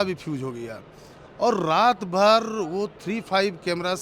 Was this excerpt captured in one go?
yes; 0 cuts

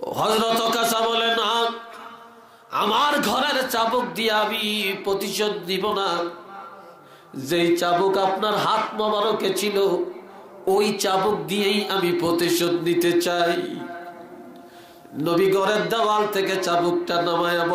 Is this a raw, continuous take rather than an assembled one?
yes; 0 cuts

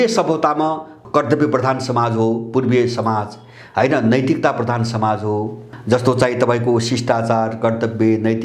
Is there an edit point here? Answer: yes; 2 cuts; at 0.9 s, 5.6 s

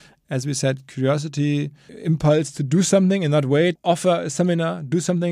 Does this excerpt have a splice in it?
yes; 2 cuts; at 1.9 s, 3.8 s

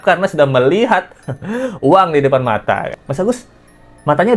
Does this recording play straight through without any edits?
no; 1 cut; at 3.0 s

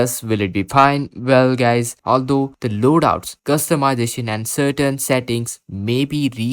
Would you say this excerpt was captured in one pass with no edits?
no; 1 cut; at 1.9 s

